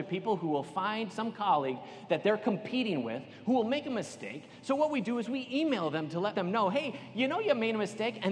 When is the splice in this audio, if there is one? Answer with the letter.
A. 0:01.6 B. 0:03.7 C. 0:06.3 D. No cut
C